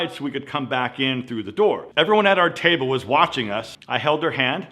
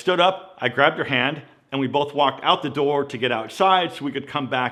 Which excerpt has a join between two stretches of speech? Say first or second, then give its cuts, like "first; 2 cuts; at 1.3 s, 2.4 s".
first; 2 cuts; at 1.9 s, 3.7 s